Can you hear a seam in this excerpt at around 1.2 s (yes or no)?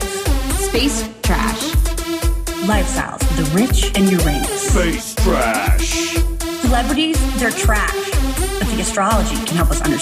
no